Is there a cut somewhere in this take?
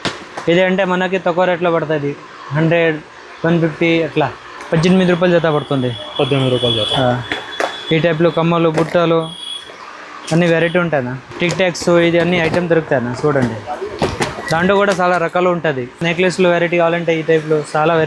yes; 3 cuts; at 4.5 s, 11.2 s, 16.0 s

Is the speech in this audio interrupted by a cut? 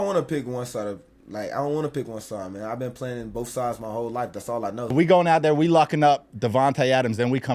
yes; 1 cut; at 4.9 s

